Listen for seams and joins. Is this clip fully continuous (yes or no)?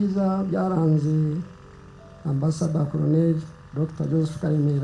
yes